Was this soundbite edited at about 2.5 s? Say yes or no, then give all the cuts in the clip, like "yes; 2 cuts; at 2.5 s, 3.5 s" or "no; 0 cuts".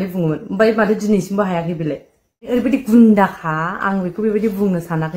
yes; 1 cut; at 2.5 s